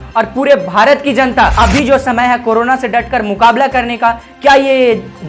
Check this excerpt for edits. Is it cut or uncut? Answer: cut